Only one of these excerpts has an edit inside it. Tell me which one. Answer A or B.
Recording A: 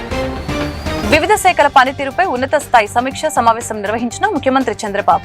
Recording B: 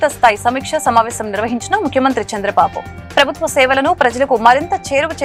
A